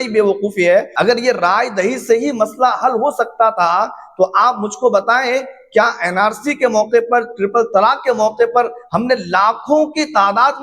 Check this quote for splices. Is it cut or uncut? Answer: cut